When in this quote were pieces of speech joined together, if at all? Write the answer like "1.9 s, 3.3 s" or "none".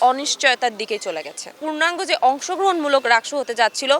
1.5 s